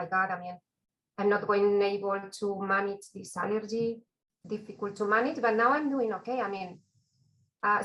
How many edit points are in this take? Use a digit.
1